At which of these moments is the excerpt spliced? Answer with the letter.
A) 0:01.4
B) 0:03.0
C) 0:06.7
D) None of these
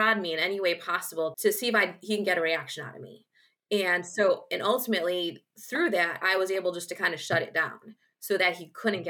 A